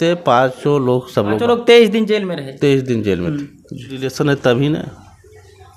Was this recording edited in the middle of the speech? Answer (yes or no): yes